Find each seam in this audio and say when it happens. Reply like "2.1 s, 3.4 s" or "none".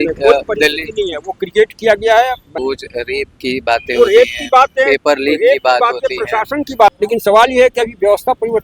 2.5 s, 6.9 s